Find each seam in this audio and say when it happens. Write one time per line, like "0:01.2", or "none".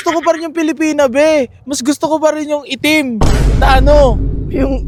none